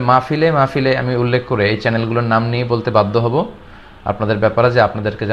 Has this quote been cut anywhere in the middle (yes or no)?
no